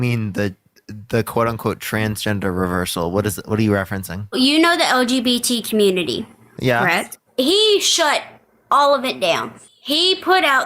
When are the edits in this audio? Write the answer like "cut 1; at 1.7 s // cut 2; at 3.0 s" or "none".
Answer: cut 1; at 4.4 s // cut 2; at 7.2 s